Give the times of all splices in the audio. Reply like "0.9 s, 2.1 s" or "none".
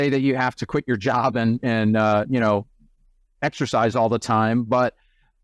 none